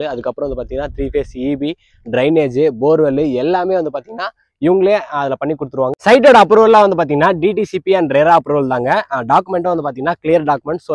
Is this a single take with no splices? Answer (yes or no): yes